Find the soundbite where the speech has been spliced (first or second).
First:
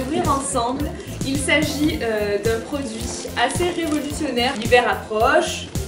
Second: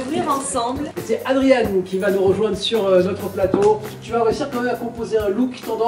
second